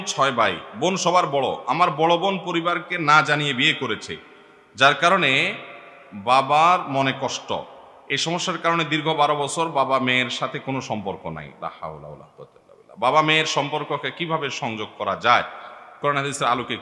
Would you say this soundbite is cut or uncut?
uncut